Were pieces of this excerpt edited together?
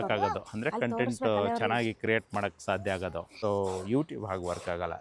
yes; 1 cut; at 3.3 s

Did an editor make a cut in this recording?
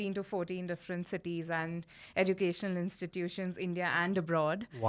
no; 0 cuts

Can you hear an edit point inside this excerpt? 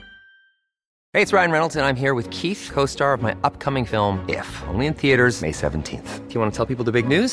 yes; 1 cut; at 0.9 s

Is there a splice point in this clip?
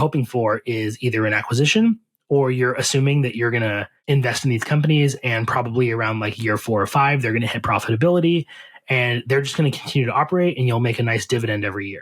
no; 0 cuts

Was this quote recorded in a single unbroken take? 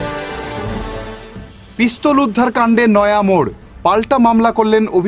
no; 1 cut; at 0.9 s

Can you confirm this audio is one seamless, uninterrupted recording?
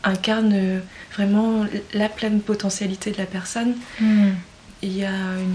yes; 0 cuts

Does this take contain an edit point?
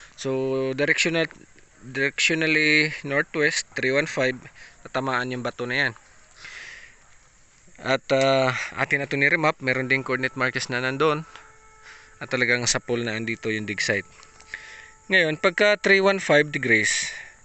no; 0 cuts

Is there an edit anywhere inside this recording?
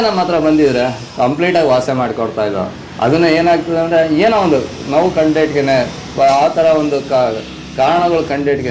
no; 0 cuts

